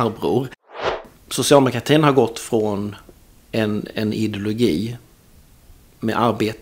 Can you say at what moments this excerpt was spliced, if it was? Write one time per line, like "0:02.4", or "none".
0:00.9